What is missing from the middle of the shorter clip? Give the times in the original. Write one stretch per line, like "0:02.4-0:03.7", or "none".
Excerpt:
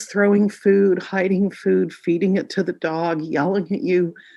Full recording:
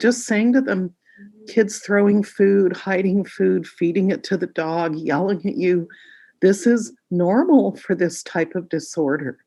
none